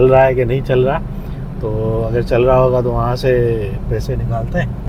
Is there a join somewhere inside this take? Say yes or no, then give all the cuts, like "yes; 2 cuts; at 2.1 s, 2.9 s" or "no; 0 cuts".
no; 0 cuts